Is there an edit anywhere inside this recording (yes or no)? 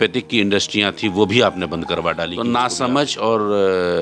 yes